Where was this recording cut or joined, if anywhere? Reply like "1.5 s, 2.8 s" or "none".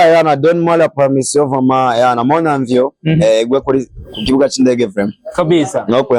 none